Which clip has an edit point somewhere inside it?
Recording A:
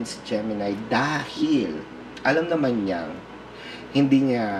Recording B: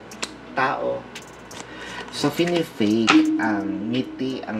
B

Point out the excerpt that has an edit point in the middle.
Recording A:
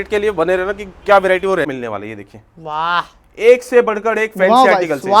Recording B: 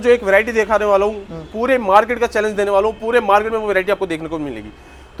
A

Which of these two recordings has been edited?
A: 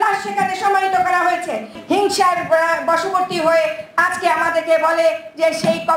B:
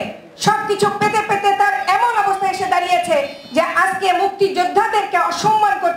A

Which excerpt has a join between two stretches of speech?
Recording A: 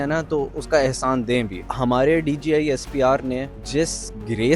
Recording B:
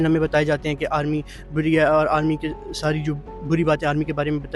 A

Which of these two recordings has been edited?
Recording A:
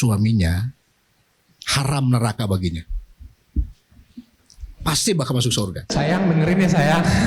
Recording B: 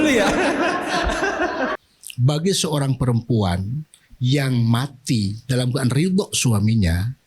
B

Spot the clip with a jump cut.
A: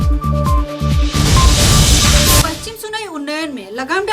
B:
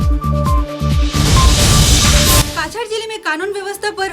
B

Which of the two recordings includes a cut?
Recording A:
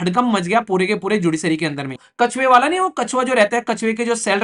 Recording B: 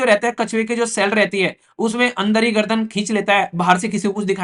A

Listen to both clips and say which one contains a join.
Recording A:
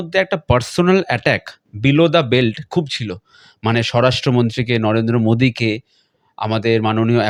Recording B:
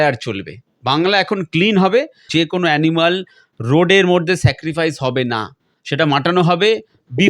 B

